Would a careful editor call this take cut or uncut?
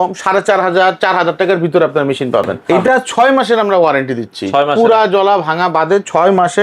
cut